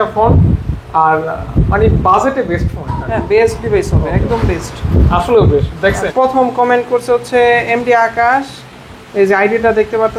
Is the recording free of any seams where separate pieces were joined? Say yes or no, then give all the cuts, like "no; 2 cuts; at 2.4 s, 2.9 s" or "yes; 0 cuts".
no; 1 cut; at 6.0 s